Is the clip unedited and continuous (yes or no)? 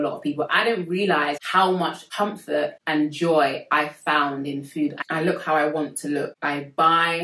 no